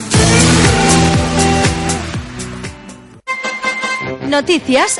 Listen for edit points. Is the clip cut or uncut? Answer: cut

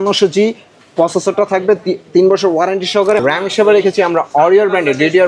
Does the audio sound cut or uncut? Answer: cut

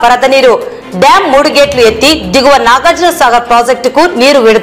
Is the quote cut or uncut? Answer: uncut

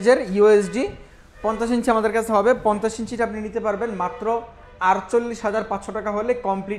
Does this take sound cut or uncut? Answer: uncut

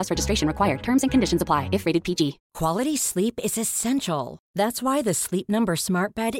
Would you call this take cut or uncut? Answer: cut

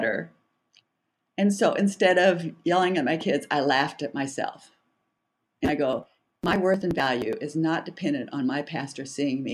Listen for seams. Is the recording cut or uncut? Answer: uncut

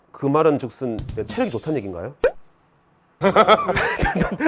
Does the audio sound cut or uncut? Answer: uncut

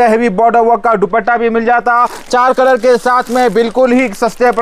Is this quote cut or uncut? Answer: uncut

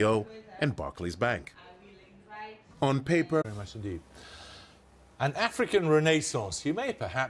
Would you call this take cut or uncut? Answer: uncut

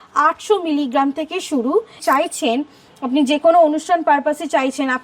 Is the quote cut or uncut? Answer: cut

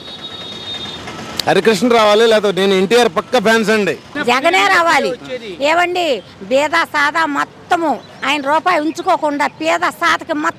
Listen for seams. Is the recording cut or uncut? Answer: cut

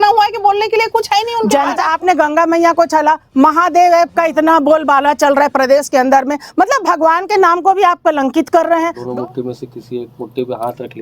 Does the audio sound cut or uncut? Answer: cut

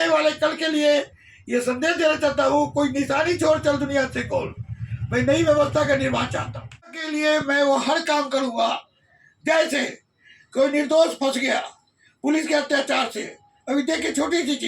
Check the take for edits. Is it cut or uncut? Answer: cut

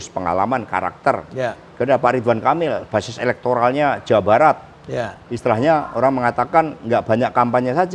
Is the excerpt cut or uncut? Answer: uncut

